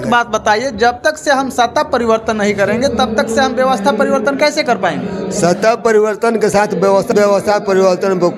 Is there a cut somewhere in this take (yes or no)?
yes